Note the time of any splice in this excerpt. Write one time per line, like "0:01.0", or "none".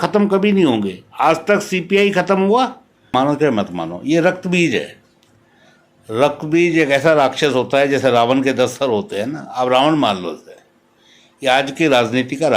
0:03.1